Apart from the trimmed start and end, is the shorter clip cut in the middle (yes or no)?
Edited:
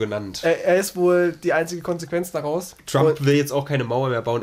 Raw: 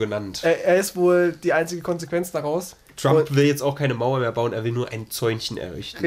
yes